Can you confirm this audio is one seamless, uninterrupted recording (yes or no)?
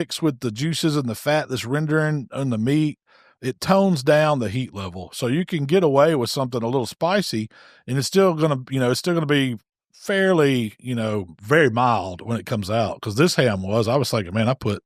yes